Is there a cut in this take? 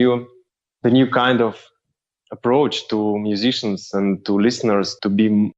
no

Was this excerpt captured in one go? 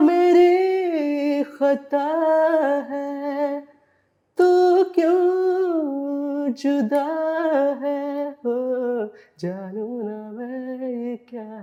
yes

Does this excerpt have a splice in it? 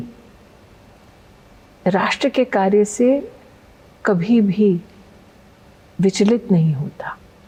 no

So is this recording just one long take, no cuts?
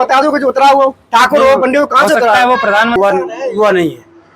no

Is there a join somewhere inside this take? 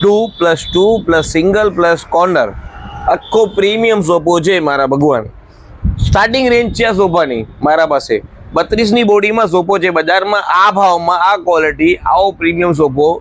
no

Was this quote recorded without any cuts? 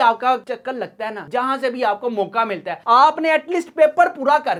yes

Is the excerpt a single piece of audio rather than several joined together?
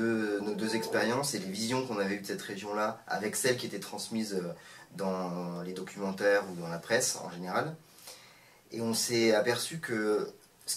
yes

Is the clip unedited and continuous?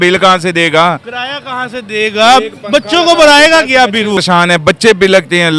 no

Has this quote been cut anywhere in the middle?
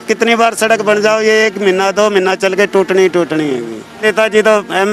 yes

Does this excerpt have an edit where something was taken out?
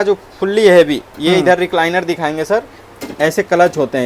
no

